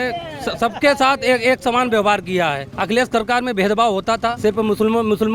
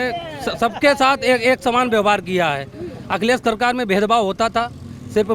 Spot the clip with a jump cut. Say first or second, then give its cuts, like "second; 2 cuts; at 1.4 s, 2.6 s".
first; 2 cuts; at 2.7 s, 4.4 s